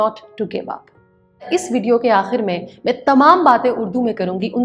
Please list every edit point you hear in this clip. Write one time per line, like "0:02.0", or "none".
0:01.5